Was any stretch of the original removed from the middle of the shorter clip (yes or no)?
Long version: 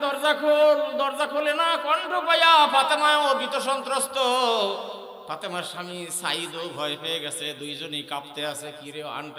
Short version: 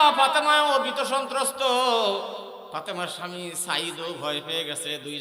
no